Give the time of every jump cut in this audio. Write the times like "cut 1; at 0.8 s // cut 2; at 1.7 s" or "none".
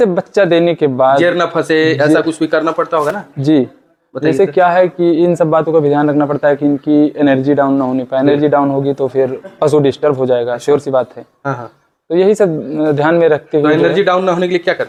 none